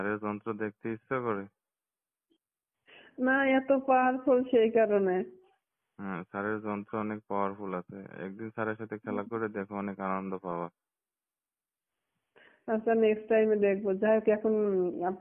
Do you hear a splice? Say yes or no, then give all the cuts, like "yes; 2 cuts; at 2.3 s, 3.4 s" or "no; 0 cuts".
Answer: no; 0 cuts